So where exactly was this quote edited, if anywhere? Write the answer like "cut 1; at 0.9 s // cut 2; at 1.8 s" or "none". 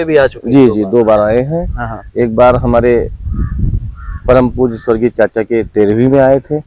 none